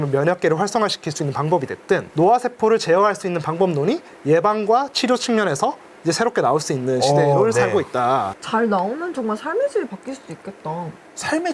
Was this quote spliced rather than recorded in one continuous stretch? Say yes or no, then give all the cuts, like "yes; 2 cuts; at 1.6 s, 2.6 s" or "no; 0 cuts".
yes; 1 cut; at 8.3 s